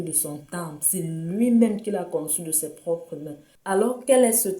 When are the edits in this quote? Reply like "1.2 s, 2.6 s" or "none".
3.5 s